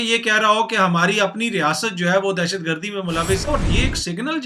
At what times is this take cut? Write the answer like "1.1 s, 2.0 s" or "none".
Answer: 3.5 s